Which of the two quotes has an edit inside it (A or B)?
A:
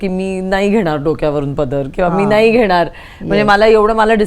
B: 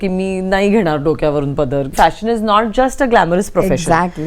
B